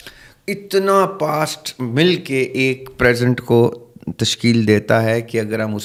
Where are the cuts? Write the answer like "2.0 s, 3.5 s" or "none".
none